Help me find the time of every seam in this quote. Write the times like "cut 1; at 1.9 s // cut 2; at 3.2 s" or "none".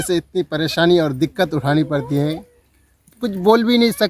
none